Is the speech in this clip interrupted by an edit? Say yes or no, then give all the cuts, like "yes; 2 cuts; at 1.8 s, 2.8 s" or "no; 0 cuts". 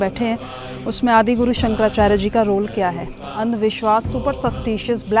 yes; 1 cut; at 3.3 s